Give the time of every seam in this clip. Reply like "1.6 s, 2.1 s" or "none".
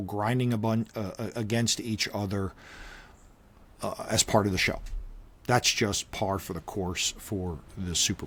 none